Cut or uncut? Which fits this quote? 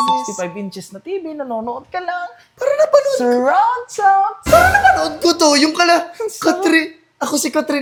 uncut